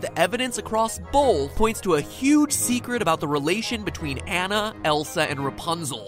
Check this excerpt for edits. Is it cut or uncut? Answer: cut